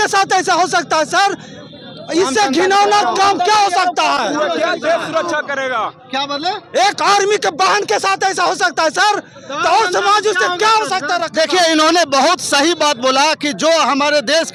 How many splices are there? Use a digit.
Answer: 0